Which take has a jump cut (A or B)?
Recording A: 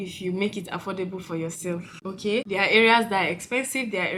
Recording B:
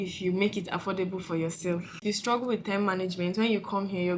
B